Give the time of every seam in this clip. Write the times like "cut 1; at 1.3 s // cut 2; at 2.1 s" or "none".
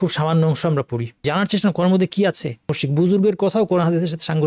cut 1; at 1.2 s // cut 2; at 2.8 s